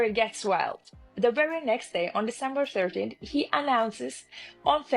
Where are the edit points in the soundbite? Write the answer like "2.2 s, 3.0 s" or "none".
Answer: 3.2 s

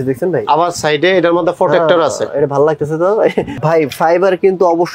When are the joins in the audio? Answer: 3.6 s

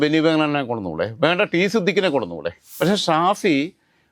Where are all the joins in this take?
2.6 s

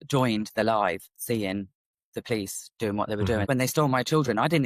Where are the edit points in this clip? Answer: 3.4 s

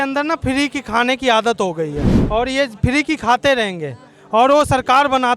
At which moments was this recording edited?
2.1 s

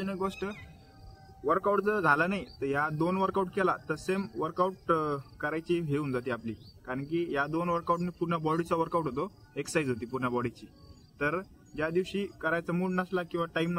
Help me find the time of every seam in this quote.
none

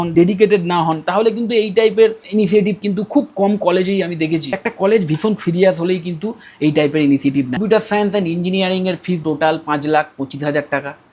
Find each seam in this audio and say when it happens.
4.6 s, 7.6 s

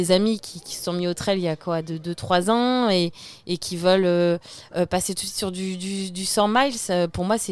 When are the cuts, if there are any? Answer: none

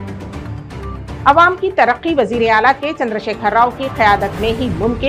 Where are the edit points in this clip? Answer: 1.1 s

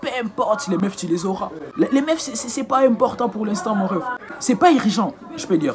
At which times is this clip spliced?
4.4 s

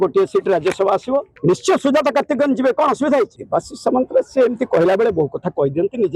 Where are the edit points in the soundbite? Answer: 1.3 s, 3.4 s

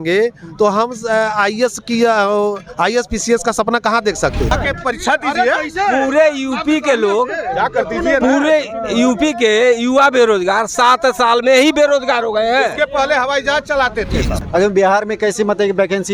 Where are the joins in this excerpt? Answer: 4.5 s, 14.4 s

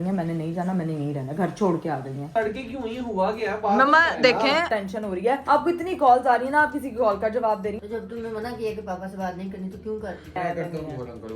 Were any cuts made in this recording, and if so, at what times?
2.2 s, 4.9 s, 7.8 s, 10.3 s

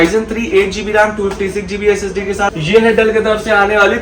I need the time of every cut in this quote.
2.5 s

